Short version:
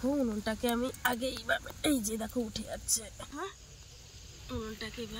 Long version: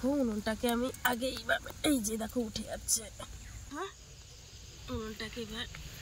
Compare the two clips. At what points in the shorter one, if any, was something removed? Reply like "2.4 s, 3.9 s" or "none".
3.3 s